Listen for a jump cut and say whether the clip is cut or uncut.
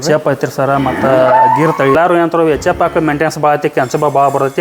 cut